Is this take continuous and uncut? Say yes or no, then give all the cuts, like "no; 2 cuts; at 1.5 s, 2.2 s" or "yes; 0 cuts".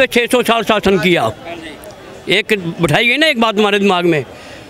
yes; 0 cuts